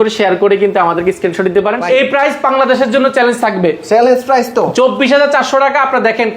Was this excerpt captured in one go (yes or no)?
no